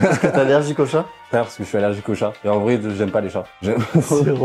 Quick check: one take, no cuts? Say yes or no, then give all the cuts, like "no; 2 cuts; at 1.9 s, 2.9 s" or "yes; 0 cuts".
yes; 0 cuts